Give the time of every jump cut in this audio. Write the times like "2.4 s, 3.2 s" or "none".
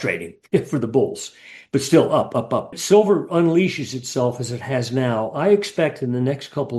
2.8 s

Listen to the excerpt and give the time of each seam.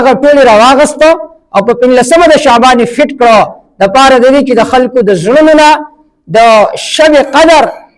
none

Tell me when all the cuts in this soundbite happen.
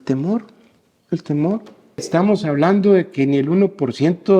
2.1 s

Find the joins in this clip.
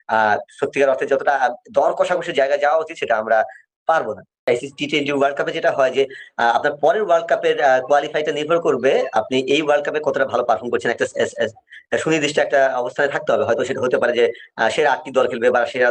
4.5 s

